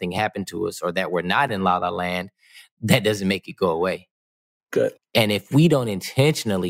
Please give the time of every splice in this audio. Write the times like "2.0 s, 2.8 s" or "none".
5.0 s